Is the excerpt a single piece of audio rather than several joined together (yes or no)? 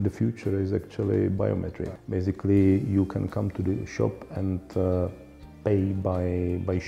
no